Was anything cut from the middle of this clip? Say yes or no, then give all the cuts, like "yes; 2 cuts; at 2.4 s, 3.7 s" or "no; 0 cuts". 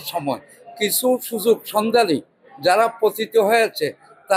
no; 0 cuts